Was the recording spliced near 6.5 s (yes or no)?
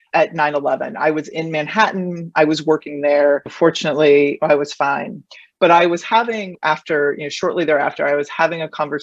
no